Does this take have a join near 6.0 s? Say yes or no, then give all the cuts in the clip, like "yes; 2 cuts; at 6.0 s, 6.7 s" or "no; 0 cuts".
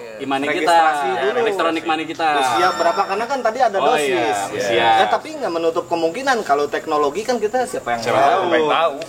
no; 0 cuts